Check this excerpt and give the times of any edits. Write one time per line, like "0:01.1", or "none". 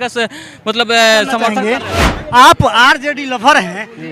0:01.7